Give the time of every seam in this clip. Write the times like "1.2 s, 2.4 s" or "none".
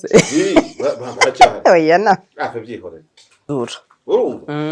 3.5 s